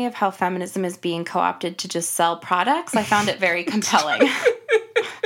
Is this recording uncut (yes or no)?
yes